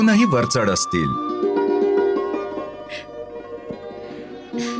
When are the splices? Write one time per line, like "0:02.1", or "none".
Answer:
0:02.5